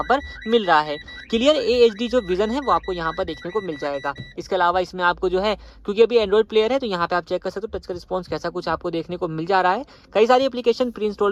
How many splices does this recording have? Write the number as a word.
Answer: zero